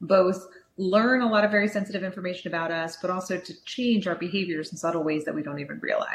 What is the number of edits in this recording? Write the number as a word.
zero